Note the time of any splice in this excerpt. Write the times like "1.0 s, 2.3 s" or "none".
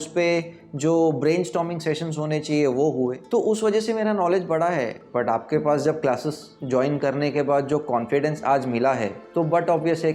3.2 s, 5.0 s, 9.2 s